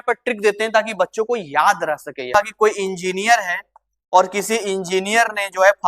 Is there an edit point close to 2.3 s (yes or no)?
yes